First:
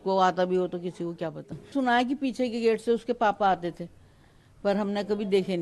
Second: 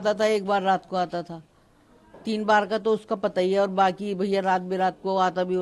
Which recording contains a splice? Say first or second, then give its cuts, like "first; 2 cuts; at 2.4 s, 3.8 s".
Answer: first; 1 cut; at 1.7 s